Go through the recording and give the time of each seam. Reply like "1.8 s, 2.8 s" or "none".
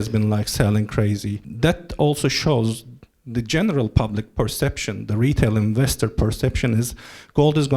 1.4 s